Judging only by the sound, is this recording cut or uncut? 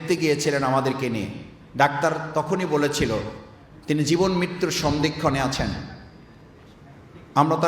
uncut